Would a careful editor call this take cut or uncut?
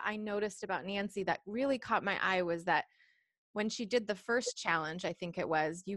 uncut